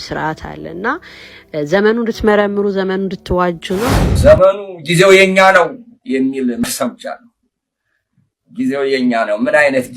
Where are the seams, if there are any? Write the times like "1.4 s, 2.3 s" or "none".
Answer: 4.0 s